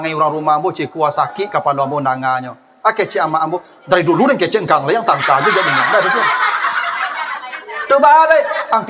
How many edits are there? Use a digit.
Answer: 0